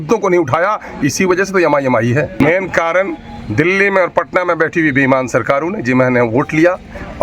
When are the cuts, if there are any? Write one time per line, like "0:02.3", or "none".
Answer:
0:02.4